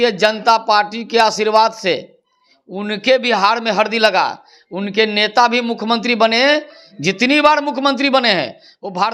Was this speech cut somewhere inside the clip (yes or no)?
no